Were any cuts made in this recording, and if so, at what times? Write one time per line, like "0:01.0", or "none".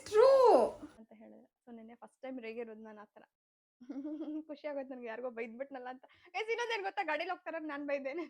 0:01.1